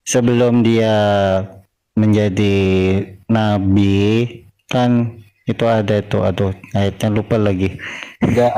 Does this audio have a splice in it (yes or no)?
no